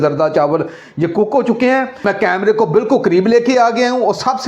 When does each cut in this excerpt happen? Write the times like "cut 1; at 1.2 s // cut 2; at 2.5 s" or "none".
cut 1; at 2.0 s